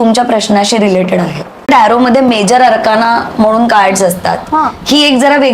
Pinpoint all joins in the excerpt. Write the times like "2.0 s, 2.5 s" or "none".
1.7 s